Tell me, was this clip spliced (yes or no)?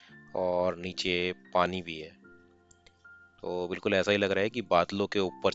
no